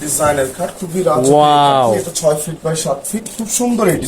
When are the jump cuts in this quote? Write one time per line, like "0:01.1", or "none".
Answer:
none